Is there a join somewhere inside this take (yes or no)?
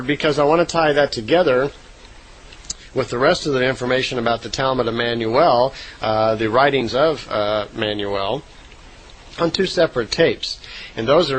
no